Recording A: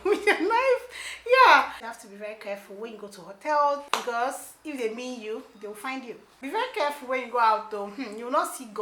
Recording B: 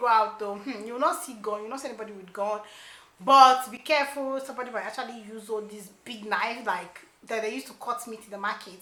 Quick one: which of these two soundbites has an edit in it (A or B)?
A